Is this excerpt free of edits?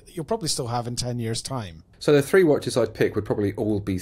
no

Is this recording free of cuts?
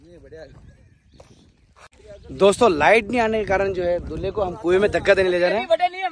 no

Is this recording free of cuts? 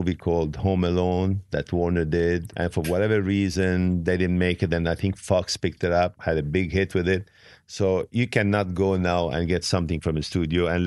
no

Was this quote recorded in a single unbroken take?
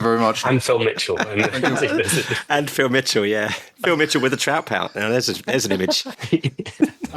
no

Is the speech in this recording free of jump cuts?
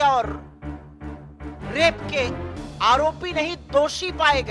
yes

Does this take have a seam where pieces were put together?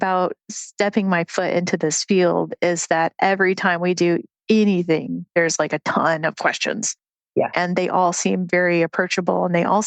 no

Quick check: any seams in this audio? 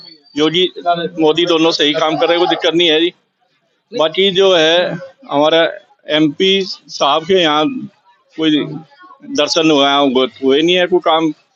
no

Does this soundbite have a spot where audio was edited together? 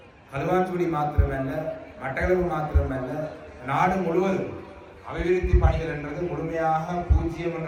no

